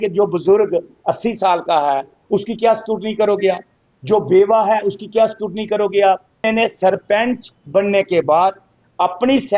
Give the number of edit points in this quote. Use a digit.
1